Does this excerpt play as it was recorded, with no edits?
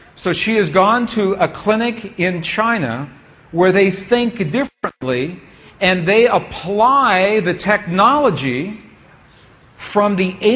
yes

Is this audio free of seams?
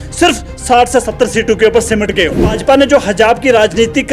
no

